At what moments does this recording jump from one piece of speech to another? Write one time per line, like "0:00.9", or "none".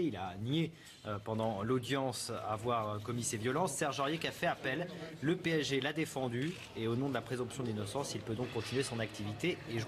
0:01.7